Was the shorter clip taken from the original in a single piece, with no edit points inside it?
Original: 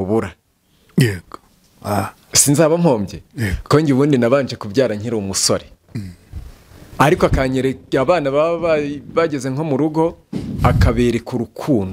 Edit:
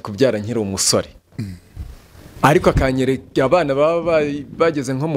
yes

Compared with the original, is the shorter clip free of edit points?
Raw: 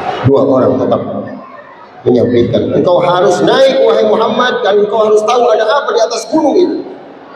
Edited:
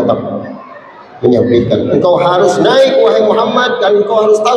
yes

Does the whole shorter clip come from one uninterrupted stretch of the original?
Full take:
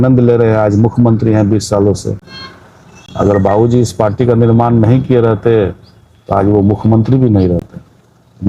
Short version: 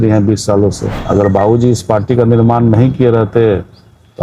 no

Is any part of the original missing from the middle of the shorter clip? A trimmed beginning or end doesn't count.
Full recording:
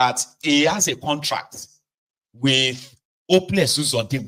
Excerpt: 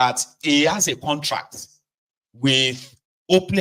no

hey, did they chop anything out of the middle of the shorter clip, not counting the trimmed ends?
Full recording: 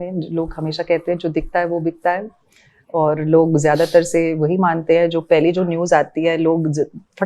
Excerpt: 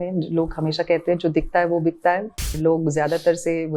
yes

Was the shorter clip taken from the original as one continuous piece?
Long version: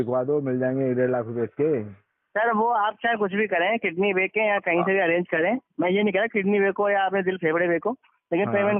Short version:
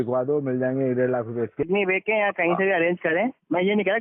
no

